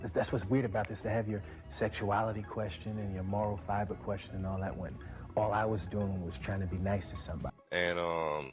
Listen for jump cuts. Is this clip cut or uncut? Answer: cut